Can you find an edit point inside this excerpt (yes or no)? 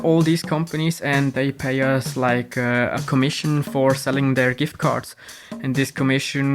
yes